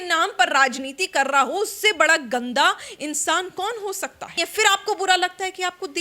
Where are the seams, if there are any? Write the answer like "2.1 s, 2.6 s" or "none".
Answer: 4.4 s